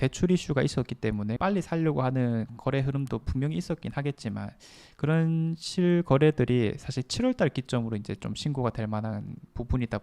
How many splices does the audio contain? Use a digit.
1